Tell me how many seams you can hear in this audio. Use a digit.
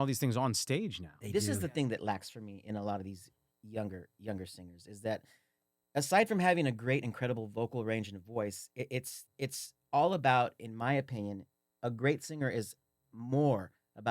2